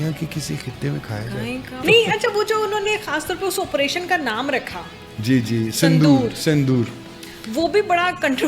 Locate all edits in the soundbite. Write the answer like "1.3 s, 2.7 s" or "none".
1.8 s